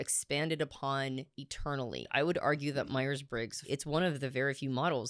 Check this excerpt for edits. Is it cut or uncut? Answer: cut